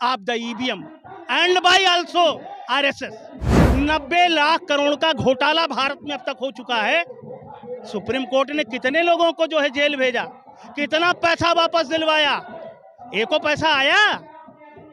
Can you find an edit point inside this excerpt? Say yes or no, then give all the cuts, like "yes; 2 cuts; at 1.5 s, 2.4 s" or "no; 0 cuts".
yes; 1 cut; at 3.6 s